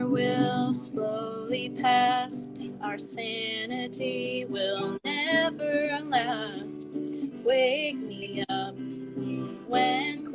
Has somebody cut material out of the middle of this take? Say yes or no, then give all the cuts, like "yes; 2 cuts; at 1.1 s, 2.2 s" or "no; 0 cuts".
no; 0 cuts